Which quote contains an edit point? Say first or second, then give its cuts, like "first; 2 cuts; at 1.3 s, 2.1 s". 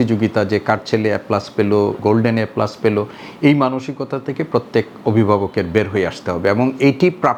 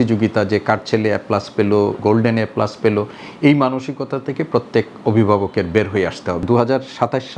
second; 1 cut; at 6.4 s